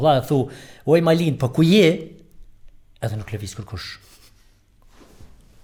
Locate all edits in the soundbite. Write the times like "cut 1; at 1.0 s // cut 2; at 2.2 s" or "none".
none